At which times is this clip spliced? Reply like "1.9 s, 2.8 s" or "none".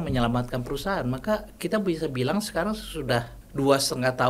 3.4 s